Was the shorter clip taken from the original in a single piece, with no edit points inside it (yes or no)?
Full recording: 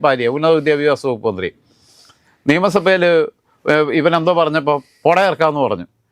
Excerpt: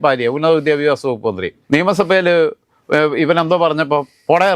no